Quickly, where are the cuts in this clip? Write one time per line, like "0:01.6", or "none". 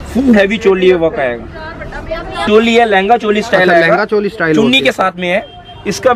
0:02.3